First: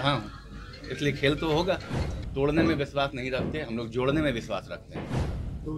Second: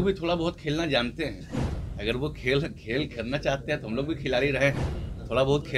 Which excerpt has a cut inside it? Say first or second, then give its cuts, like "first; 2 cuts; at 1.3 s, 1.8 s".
first; 1 cut; at 2.1 s